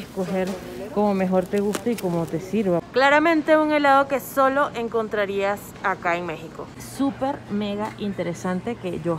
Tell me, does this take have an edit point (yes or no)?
yes